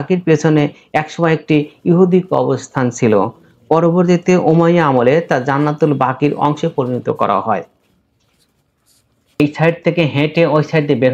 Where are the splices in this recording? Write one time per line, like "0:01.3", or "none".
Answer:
0:09.4